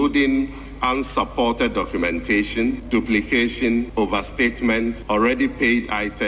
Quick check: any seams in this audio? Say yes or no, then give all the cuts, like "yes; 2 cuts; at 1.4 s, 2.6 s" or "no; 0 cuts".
yes; 3 cuts; at 2.8 s, 3.9 s, 5.0 s